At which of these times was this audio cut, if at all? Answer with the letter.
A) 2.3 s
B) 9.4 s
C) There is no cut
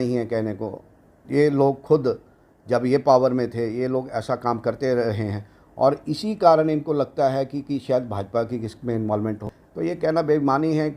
B